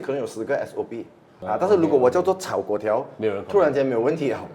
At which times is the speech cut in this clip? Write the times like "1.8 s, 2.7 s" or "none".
1.3 s